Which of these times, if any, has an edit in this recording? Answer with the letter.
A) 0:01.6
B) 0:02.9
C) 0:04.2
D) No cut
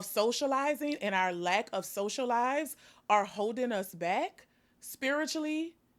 D